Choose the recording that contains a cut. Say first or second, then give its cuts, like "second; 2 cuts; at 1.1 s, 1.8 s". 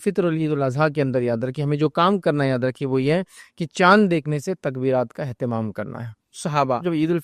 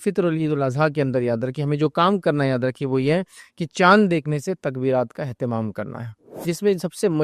second; 1 cut; at 6.3 s